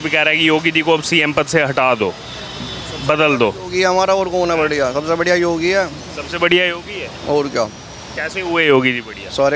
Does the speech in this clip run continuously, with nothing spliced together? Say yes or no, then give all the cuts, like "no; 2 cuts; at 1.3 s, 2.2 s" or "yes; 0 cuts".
yes; 0 cuts